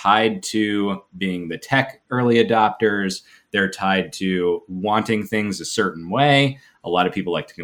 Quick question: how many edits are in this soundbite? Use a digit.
0